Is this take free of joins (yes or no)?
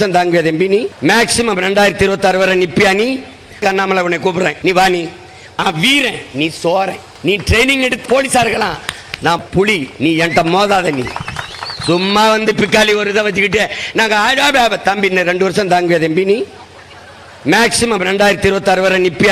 no